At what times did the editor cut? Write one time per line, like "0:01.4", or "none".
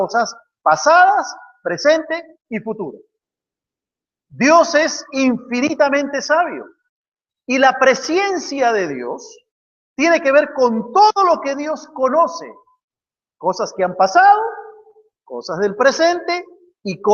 0:13.1